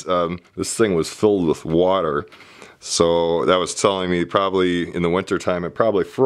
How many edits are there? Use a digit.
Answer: 0